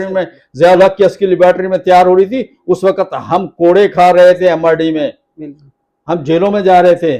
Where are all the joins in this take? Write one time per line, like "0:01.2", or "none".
none